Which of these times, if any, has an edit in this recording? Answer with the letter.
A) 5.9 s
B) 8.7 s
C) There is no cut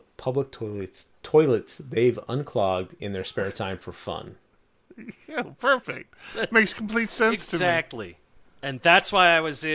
B